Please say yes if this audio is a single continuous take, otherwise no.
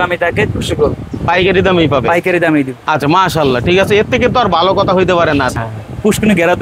no